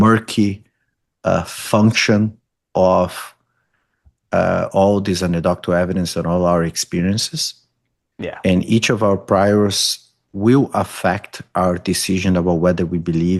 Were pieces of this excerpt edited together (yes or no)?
no